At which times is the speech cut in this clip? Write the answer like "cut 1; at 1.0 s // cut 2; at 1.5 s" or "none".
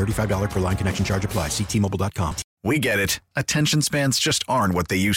cut 1; at 2.4 s